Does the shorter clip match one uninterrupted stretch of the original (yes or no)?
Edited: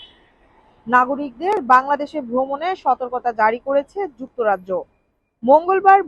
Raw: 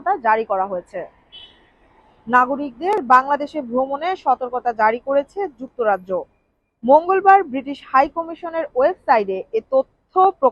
yes